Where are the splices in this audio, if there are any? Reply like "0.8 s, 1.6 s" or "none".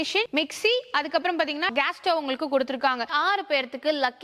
1.7 s, 3.1 s

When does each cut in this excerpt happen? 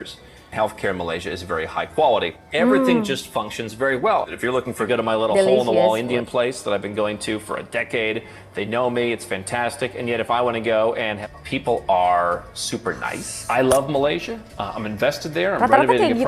4.9 s, 11.2 s

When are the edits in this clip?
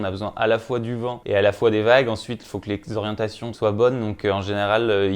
1.2 s, 3.4 s

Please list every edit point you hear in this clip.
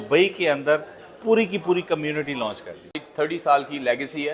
3.1 s

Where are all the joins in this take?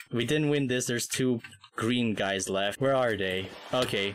2.7 s

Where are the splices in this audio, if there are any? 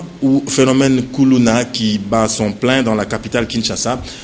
none

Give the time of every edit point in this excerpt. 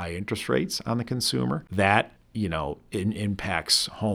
1.7 s, 2.2 s

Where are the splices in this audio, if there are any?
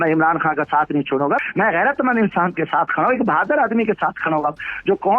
1.4 s

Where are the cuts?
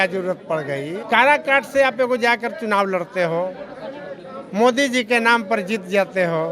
0.9 s

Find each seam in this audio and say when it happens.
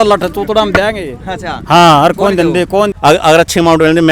2.9 s

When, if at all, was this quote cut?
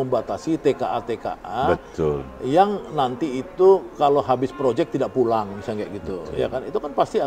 none

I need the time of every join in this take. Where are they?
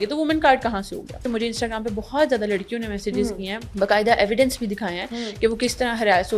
1.2 s, 3.6 s

